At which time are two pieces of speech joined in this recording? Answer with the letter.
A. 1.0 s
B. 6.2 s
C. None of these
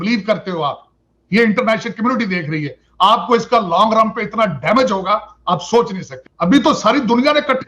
B